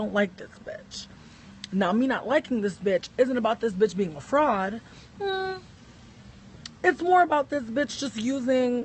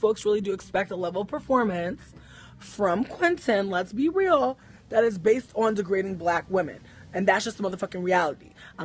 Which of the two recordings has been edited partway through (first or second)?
second